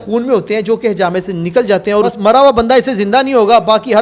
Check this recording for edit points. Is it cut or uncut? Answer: cut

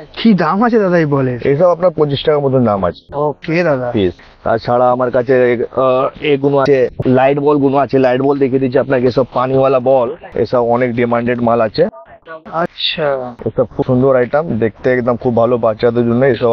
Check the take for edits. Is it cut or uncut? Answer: uncut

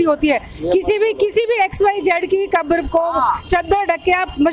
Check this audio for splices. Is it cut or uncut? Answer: uncut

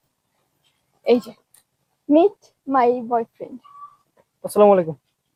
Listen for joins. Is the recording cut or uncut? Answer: uncut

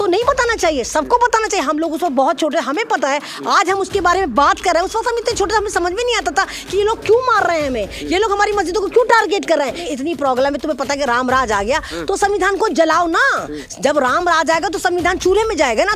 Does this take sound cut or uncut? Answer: cut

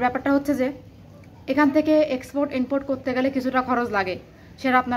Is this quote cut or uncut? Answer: uncut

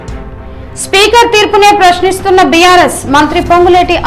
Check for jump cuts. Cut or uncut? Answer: cut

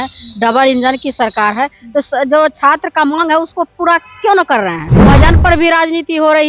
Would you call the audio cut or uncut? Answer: cut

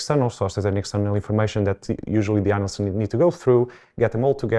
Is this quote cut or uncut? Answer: uncut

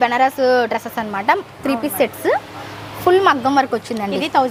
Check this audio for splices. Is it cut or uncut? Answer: uncut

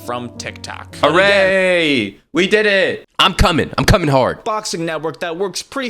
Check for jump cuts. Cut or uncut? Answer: cut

